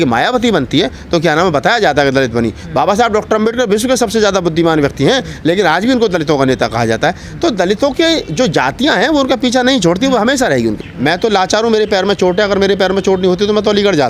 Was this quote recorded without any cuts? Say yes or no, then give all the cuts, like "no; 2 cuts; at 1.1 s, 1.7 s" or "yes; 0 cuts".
no; 1 cut; at 10.8 s